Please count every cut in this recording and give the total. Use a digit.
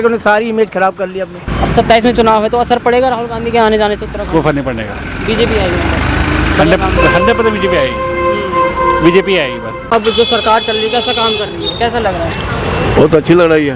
2